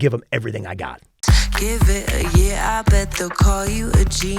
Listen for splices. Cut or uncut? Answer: cut